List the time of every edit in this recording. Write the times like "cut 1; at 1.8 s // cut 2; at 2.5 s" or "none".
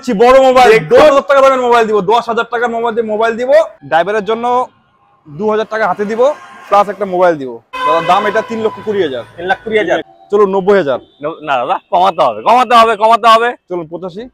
cut 1; at 3.8 s // cut 2; at 7.7 s // cut 3; at 10.1 s